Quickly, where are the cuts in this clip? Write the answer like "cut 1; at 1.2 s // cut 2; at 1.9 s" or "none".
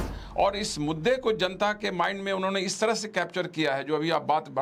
none